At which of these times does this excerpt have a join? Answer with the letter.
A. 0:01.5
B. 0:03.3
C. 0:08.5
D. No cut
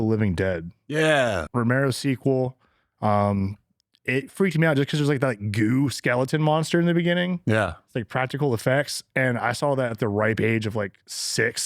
A